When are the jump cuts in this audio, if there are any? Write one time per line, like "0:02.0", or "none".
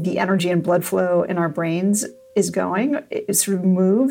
0:02.2